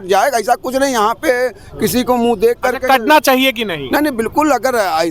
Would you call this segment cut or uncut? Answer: uncut